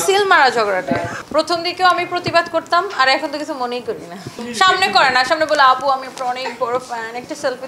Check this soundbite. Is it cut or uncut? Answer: uncut